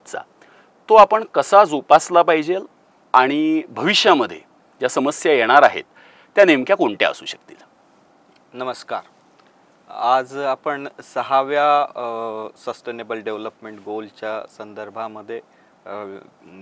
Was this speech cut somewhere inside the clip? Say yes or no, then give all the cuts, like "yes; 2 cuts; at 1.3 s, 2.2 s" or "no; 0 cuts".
no; 0 cuts